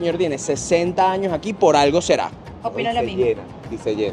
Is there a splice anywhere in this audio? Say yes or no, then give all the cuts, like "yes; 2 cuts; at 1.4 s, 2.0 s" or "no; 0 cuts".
no; 0 cuts